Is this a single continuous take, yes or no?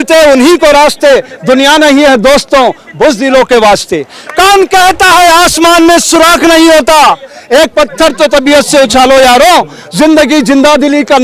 yes